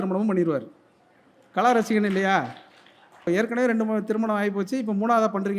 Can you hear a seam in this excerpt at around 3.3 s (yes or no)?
yes